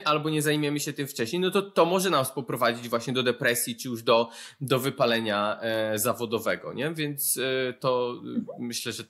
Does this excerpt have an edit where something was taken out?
no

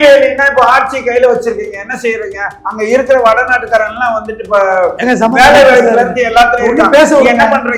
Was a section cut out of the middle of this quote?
no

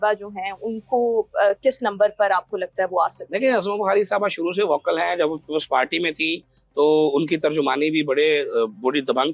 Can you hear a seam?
no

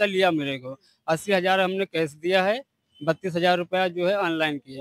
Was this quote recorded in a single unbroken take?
yes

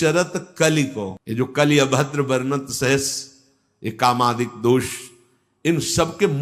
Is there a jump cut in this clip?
no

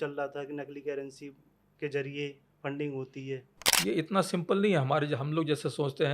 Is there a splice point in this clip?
yes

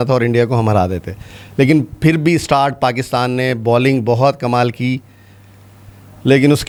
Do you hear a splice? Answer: no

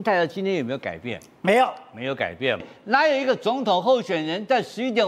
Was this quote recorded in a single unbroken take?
no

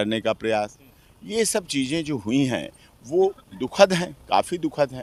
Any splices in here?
no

